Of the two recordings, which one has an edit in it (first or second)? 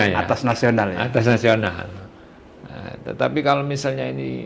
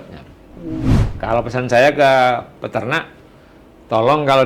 second